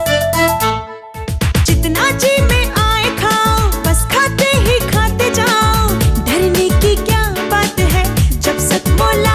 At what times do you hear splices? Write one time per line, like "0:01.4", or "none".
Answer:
none